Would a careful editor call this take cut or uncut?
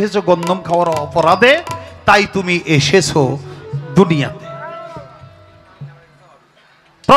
uncut